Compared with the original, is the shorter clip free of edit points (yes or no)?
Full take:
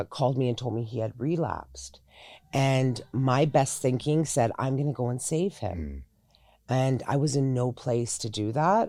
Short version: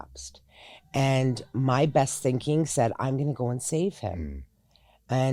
yes